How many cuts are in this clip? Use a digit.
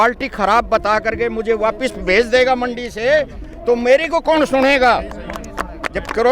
0